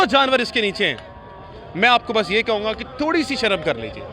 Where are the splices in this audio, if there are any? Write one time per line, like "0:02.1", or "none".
none